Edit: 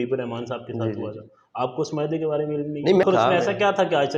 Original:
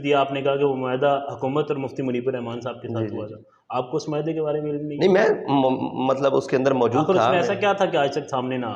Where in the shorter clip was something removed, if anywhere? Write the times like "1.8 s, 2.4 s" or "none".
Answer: 3.0 s